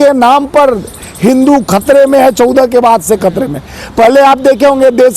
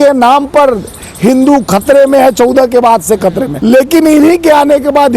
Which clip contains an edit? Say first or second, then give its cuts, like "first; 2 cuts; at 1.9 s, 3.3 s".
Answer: second; 1 cut; at 3.5 s